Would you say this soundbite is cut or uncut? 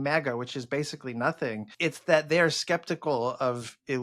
cut